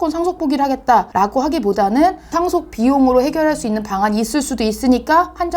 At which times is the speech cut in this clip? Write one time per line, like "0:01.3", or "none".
0:01.1